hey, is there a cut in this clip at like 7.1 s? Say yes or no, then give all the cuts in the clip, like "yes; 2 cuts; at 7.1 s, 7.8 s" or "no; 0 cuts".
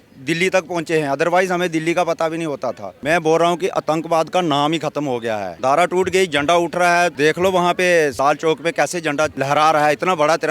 yes; 5 cuts; at 2.9 s, 5.5 s, 7.1 s, 8.2 s, 9.3 s